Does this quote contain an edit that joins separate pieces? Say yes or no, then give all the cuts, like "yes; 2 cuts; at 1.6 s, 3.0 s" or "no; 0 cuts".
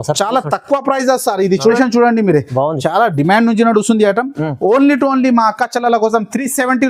yes; 1 cut; at 1.8 s